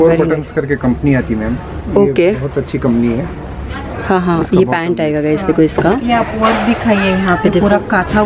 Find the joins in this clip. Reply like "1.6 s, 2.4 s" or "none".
none

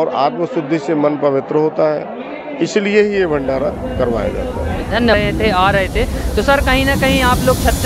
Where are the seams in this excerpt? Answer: 5.1 s

